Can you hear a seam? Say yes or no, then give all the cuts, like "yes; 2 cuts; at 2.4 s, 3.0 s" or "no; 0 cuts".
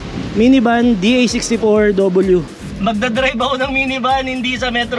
yes; 1 cut; at 2.6 s